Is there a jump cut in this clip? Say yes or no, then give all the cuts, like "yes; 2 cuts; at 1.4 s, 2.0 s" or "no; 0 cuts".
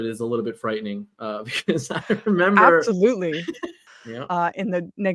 yes; 1 cut; at 3.8 s